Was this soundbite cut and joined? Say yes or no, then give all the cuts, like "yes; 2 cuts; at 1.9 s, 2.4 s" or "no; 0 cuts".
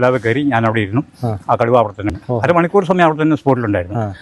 yes; 1 cut; at 2.2 s